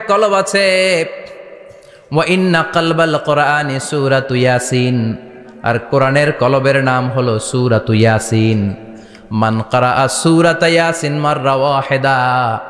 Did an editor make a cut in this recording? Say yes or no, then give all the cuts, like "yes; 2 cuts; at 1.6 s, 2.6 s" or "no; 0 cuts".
no; 0 cuts